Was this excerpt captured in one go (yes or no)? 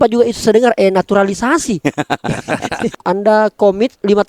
no